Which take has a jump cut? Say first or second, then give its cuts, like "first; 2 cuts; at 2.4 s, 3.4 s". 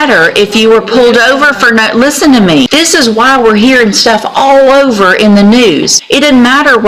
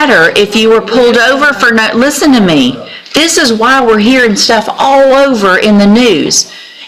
first; 2 cuts; at 2.7 s, 6.0 s